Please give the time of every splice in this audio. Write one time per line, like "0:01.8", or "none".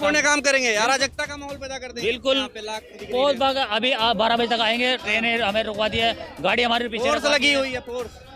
0:02.5